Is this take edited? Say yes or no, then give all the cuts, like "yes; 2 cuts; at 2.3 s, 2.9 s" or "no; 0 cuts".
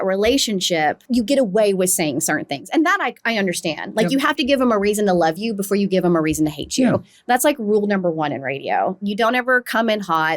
yes; 1 cut; at 1.0 s